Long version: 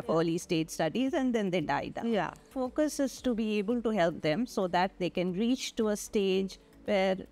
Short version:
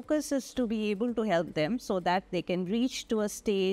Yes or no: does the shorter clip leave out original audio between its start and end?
no